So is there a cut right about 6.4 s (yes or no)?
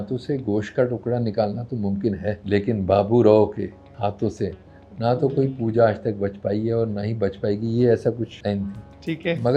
no